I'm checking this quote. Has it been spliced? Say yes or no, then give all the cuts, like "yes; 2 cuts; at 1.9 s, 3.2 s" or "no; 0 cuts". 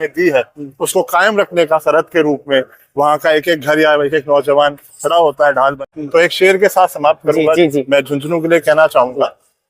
yes; 1 cut; at 5.9 s